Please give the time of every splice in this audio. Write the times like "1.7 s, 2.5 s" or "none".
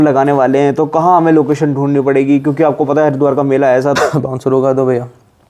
4.0 s